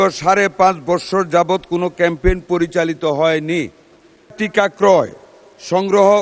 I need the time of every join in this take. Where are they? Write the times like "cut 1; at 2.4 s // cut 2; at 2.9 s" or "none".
cut 1; at 4.3 s